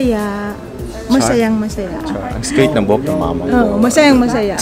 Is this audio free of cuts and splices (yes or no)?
yes